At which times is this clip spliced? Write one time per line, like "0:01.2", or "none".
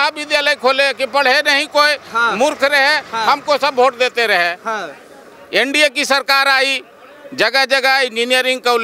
none